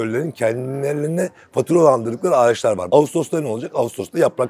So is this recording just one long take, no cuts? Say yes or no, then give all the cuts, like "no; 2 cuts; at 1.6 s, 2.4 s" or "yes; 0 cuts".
no; 1 cut; at 2.8 s